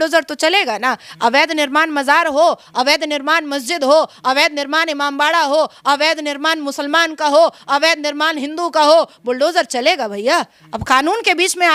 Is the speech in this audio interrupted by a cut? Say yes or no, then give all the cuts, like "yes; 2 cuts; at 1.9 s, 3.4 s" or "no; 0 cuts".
no; 0 cuts